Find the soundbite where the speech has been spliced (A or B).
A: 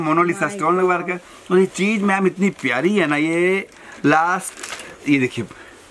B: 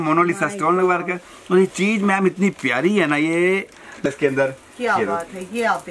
B